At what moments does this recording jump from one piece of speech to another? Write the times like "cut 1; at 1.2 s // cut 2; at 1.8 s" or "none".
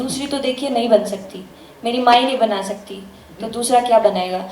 none